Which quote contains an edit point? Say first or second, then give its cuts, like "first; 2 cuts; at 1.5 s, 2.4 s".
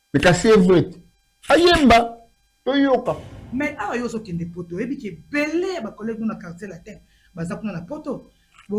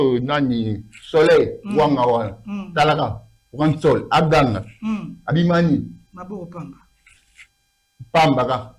first; 1 cut; at 3.4 s